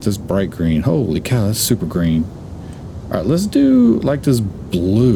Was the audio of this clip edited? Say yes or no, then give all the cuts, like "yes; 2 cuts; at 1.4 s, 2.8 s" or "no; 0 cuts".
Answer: no; 0 cuts